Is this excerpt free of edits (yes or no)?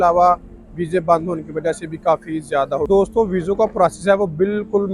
no